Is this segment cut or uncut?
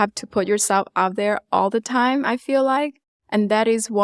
uncut